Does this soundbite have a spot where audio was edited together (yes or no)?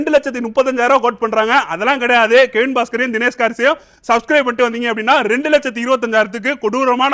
no